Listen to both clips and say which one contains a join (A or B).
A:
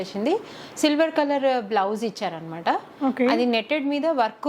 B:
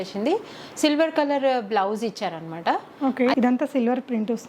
B